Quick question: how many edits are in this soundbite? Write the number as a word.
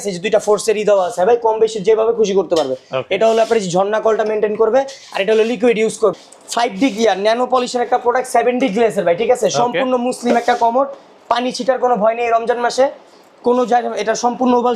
one